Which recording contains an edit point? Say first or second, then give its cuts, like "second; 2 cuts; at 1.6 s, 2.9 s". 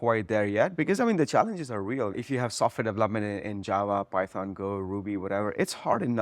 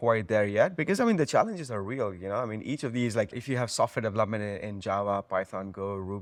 first; 1 cut; at 2.2 s